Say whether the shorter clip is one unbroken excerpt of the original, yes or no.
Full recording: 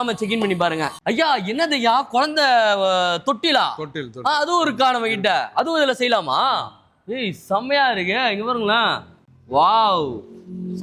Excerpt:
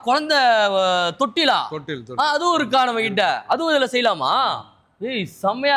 yes